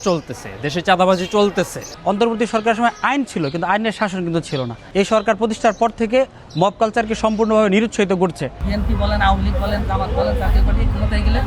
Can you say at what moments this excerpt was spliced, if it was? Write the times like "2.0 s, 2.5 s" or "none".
1.8 s, 4.8 s, 8.6 s